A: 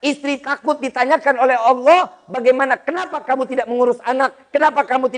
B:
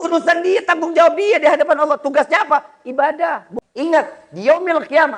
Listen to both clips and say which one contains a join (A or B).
B